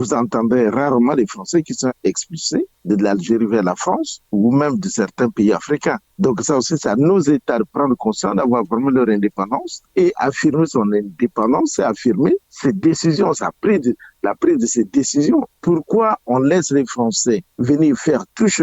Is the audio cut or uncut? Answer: cut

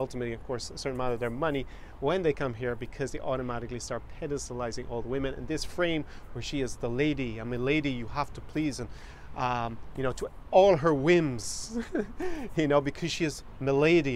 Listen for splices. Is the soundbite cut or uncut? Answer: uncut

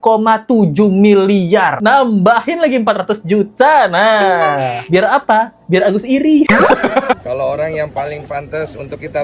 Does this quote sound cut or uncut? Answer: cut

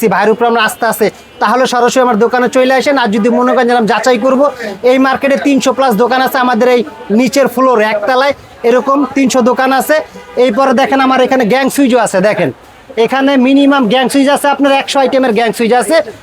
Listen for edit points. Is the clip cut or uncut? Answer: uncut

